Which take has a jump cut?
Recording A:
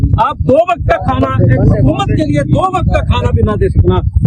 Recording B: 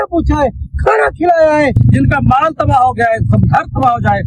B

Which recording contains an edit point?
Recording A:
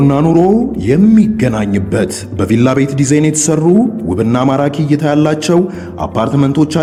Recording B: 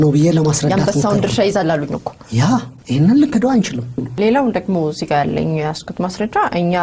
B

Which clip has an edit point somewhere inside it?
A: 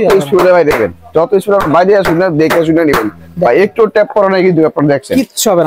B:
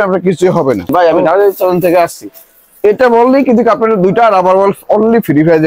B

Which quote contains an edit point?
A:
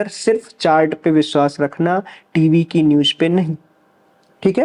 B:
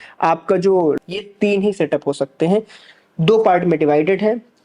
B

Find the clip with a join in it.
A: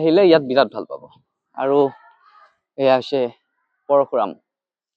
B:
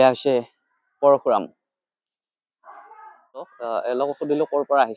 B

